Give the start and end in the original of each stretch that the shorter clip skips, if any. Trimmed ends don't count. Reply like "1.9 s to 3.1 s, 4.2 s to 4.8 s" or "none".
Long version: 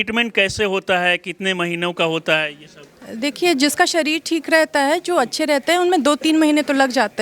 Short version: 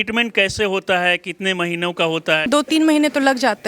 2.5 s to 6.0 s

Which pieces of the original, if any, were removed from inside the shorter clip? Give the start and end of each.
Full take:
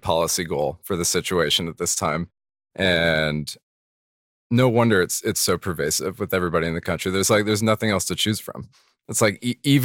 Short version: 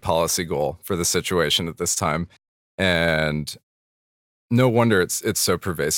none

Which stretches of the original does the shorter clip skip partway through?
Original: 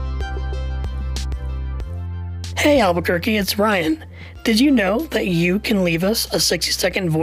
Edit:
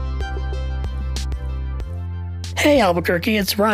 none

